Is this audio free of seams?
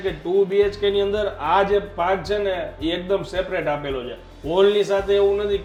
yes; 0 cuts

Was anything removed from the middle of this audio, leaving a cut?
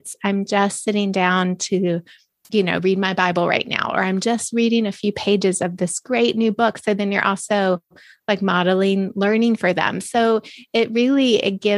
no; 0 cuts

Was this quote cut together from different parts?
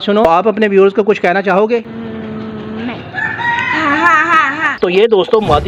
yes; 1 cut; at 4.7 s

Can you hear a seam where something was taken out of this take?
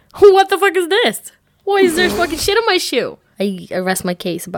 yes; 1 cut; at 3.2 s

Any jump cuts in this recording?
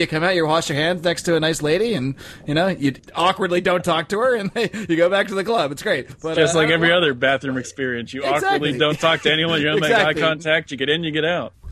yes; 2 cuts; at 3.0 s, 6.1 s

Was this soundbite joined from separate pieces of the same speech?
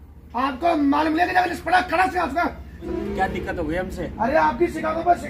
yes; 1 cut; at 2.8 s

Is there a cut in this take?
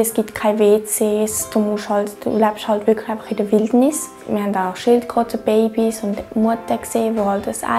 yes; 1 cut; at 4.2 s

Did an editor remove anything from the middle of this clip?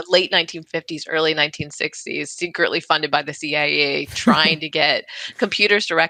no; 0 cuts

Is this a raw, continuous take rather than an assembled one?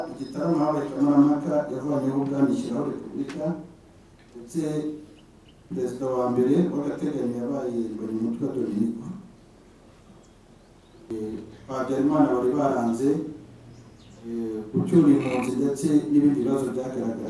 no; 1 cut; at 11.1 s

